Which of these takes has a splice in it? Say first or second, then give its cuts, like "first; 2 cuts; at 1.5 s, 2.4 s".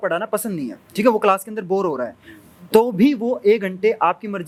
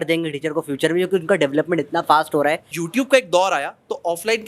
second; 1 cut; at 2.8 s